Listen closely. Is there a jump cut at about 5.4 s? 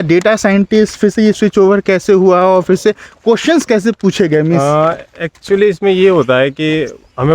no; 0 cuts

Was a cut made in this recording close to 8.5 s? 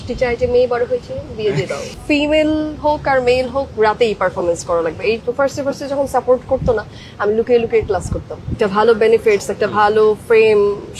yes; 3 cuts; at 1.9 s, 5.2 s, 8.5 s

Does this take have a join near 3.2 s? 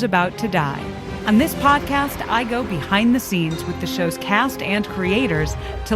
no; 1 cut; at 1.1 s

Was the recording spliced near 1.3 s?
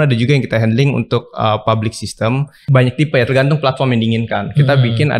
no; 1 cut; at 2.6 s

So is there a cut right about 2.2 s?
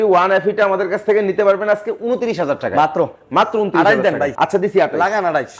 no; 1 cut; at 4.3 s

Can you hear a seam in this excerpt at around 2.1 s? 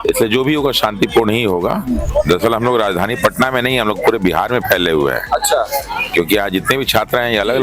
yes; 1 cut; at 2.1 s

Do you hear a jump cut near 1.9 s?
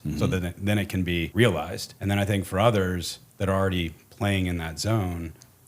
yes; 2 cuts; at 1.3 s, 1.9 s

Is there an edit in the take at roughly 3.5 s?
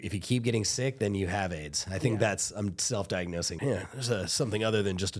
yes; 1 cut; at 3.5 s

